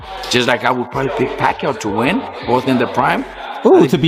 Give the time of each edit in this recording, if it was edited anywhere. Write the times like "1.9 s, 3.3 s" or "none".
none